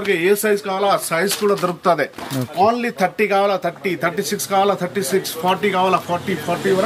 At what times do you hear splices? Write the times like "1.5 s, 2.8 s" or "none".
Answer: none